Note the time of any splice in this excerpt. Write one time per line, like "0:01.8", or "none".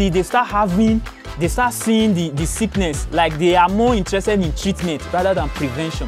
none

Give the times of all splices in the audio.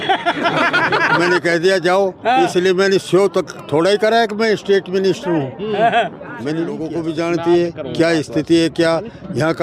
0:06.9

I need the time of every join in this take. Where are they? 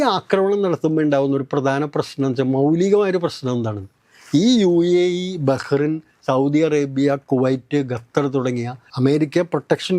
0:08.8

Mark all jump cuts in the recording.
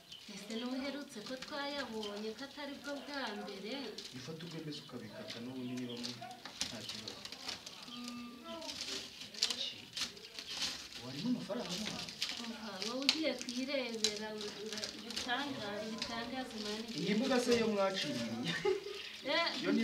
none

